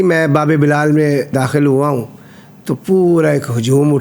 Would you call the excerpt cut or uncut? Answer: cut